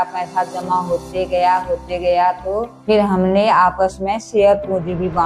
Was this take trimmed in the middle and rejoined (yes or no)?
yes